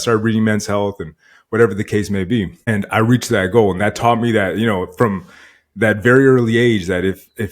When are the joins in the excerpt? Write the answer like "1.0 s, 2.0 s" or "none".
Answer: 2.7 s